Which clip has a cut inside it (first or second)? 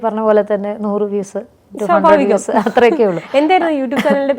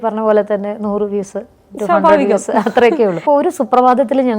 second